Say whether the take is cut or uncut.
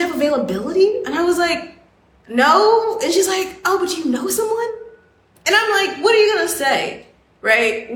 uncut